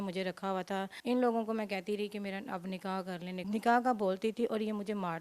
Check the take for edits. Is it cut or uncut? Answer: cut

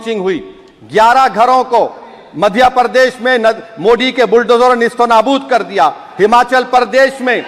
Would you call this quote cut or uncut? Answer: uncut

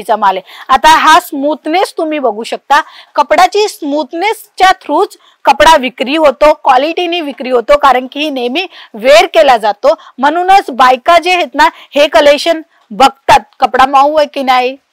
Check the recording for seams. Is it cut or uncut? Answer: uncut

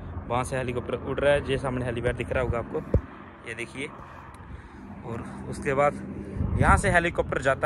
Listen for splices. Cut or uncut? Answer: uncut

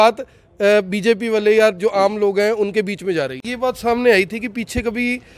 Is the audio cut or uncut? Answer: cut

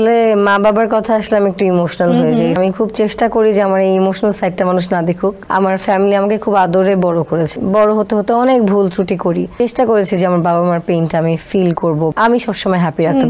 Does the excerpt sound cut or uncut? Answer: cut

